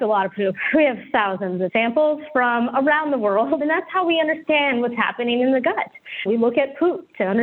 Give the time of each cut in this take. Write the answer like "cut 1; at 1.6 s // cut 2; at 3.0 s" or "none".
cut 1; at 1.7 s // cut 2; at 3.6 s